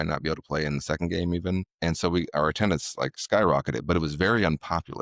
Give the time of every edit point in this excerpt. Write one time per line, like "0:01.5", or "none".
0:01.7